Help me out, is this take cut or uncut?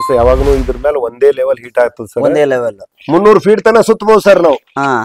cut